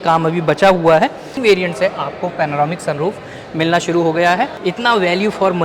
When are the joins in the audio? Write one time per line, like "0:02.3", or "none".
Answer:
0:01.3
0:04.5

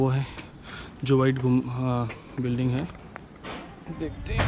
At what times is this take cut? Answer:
0:03.4

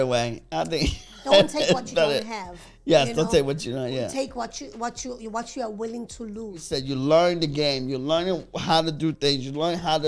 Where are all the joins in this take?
0:06.7

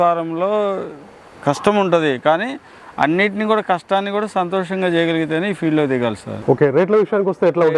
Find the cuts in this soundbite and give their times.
0:06.3

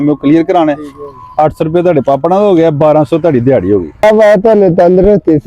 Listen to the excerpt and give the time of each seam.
0:04.0

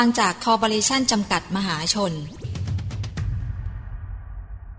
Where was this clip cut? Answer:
0:02.5

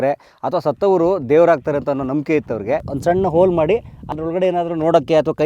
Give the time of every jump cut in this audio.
0:02.9

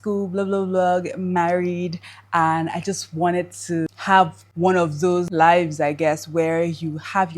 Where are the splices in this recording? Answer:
0:03.9
0:05.3

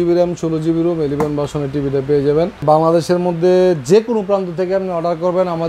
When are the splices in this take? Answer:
0:02.6

